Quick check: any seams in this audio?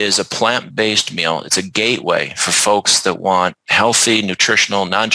no; 0 cuts

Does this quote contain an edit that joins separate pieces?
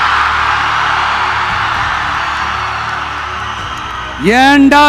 no; 0 cuts

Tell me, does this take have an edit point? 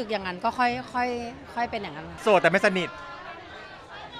yes; 1 cut; at 2.1 s

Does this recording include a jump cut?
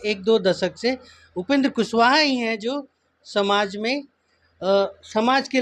no; 0 cuts

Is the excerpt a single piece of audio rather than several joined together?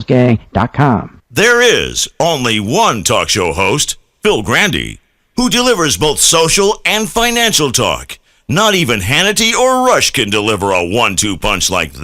no; 1 cut; at 1.2 s

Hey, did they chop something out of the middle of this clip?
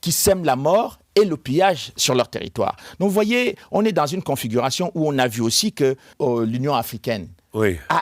yes; 1 cut; at 6.1 s

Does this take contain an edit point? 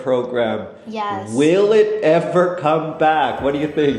no; 0 cuts

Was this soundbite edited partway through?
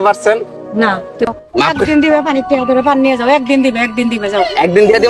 yes; 1 cut; at 1.3 s

